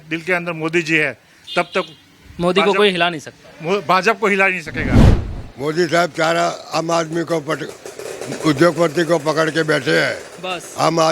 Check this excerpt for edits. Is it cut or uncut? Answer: cut